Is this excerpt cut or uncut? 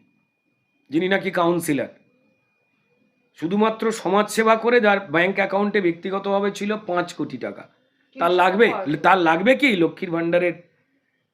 uncut